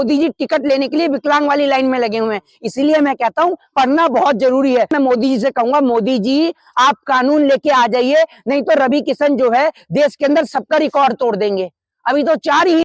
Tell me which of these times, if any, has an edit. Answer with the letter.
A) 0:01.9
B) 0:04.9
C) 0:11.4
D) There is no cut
B